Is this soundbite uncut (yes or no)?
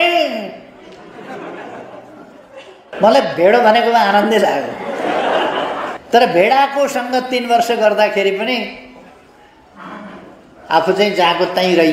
no